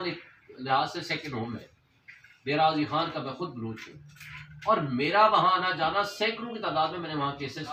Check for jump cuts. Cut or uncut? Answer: uncut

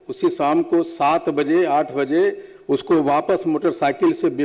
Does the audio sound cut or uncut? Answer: uncut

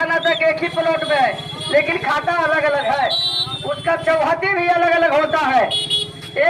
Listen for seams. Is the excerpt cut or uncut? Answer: uncut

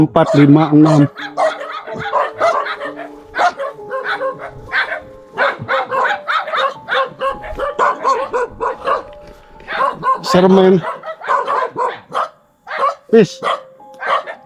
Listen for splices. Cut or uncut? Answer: uncut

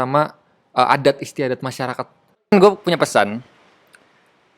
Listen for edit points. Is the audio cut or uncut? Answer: cut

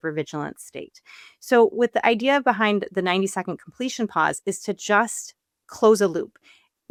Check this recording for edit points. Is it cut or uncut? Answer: uncut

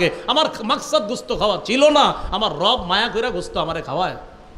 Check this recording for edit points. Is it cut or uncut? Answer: uncut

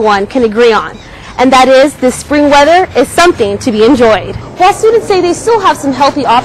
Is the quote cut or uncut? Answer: cut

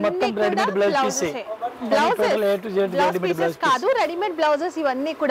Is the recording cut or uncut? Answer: uncut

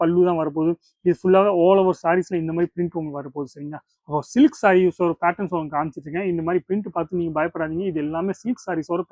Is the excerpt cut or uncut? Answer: uncut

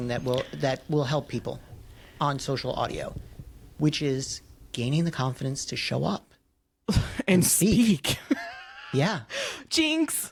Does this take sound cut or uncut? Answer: uncut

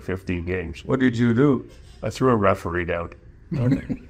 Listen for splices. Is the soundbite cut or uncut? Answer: uncut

